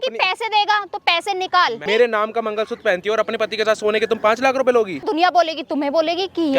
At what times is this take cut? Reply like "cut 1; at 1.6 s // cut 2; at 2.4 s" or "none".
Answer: cut 1; at 1.8 s // cut 2; at 5.0 s